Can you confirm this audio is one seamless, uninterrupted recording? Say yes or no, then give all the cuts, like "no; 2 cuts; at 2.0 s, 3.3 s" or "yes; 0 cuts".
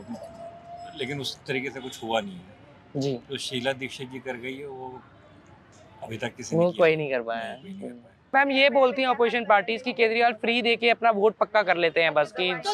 no; 1 cut; at 8.3 s